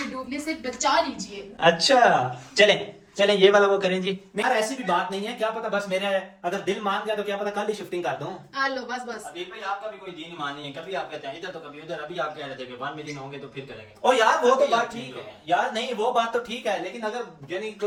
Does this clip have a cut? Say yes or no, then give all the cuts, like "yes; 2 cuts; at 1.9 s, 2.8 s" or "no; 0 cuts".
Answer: no; 0 cuts